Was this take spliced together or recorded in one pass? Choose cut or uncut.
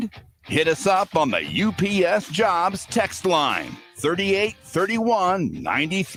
uncut